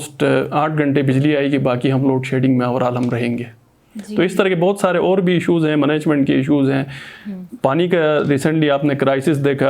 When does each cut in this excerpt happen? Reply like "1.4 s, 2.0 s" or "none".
none